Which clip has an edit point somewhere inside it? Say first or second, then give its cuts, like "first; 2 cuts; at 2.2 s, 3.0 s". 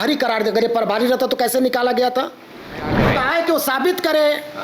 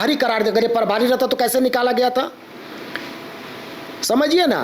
first; 1 cut; at 2.9 s